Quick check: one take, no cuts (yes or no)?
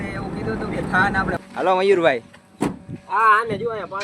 no